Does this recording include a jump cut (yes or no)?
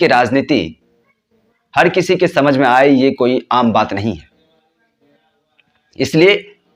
no